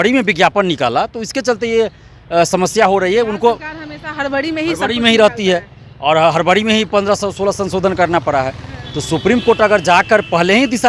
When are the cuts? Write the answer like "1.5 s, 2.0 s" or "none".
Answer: none